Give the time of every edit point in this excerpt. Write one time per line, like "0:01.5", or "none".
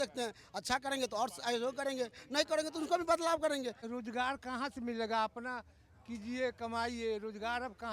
0:03.8